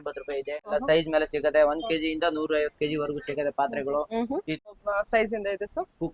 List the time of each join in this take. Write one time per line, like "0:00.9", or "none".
0:00.7
0:04.7